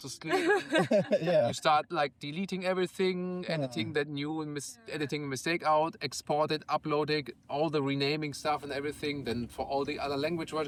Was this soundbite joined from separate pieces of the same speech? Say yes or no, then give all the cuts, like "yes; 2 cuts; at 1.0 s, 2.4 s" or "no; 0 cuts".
no; 0 cuts